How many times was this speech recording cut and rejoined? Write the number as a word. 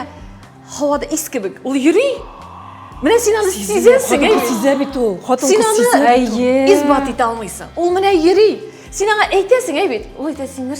zero